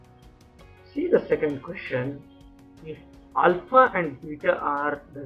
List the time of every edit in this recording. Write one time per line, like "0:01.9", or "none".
0:00.9